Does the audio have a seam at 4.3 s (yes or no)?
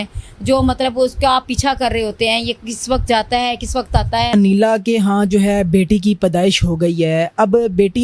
yes